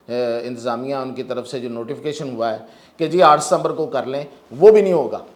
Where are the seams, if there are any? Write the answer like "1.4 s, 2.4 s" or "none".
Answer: none